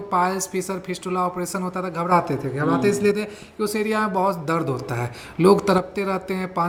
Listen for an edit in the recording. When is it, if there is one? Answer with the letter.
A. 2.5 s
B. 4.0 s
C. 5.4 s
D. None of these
D